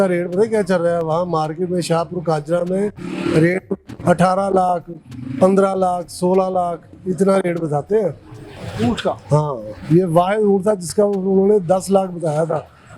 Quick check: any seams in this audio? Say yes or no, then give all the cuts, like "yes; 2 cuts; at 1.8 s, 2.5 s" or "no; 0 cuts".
no; 0 cuts